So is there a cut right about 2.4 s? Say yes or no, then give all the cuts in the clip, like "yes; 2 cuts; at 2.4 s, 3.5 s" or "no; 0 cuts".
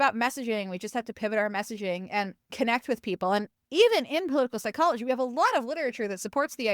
yes; 2 cuts; at 2.4 s, 3.6 s